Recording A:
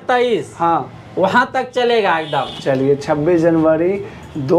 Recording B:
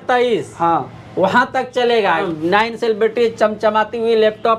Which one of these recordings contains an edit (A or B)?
B